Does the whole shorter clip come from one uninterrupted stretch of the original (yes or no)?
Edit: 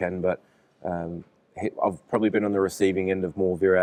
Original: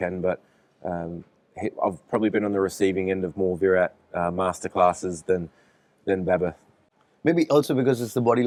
yes